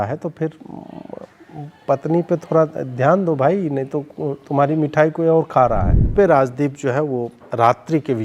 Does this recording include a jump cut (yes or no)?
yes